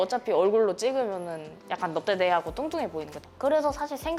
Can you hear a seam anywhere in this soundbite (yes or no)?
no